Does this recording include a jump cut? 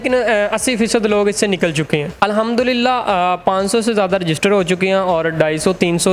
yes; 1 cut; at 2.2 s

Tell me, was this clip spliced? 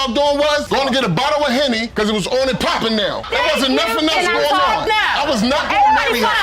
no; 0 cuts

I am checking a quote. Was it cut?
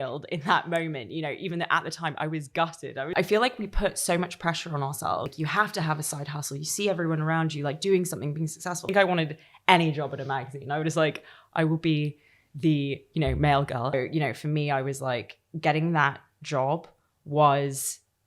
yes; 4 cuts; at 3.1 s, 5.3 s, 8.9 s, 13.9 s

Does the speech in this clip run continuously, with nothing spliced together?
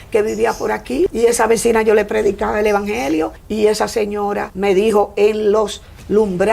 no; 3 cuts; at 1.1 s, 3.4 s, 4.5 s

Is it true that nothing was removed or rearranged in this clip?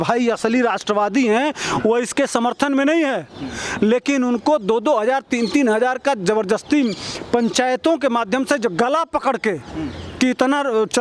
yes; 0 cuts

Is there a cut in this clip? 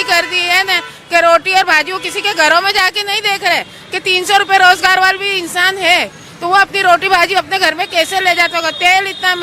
no; 0 cuts

